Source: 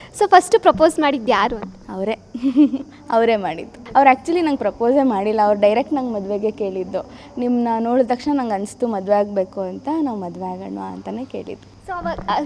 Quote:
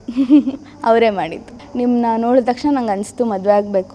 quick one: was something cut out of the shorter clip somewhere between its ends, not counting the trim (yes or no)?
yes